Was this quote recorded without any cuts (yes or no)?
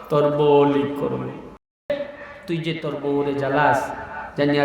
no